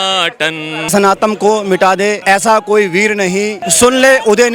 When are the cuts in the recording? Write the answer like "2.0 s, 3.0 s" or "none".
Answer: 0.8 s, 2.2 s, 3.6 s